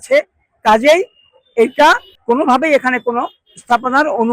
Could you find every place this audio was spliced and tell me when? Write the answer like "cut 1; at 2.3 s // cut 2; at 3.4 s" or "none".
cut 1; at 2.1 s